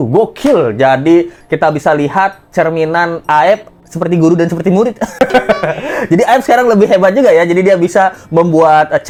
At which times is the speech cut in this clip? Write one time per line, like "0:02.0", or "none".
none